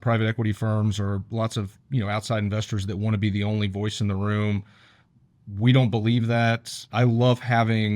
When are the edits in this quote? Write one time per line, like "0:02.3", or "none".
0:06.9